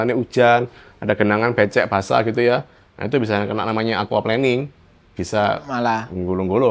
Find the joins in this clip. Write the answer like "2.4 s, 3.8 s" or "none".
none